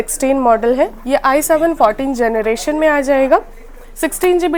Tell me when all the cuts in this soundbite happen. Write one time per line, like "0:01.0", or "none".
none